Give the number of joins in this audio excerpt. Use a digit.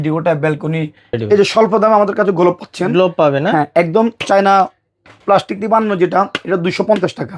1